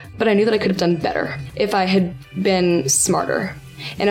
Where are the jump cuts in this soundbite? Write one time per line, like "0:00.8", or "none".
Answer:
0:01.4